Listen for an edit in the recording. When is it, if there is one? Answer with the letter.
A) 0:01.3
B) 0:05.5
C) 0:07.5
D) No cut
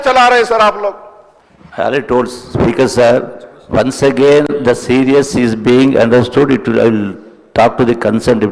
D